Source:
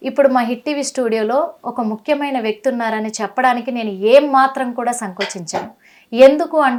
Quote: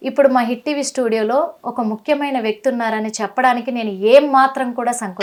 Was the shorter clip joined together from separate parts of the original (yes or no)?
no